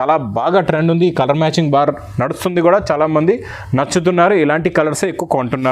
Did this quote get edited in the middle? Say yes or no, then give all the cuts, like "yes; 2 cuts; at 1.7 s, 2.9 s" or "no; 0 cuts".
no; 0 cuts